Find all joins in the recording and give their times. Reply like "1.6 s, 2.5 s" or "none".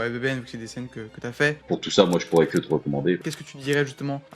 1.6 s, 3.3 s